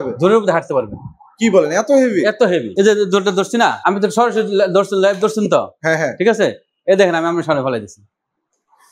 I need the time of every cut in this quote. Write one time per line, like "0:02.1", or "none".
0:02.7
0:03.8